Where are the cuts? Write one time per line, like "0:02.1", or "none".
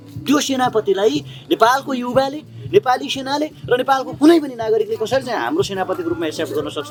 none